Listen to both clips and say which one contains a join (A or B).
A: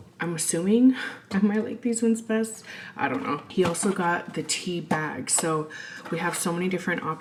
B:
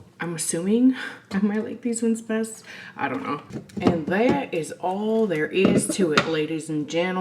B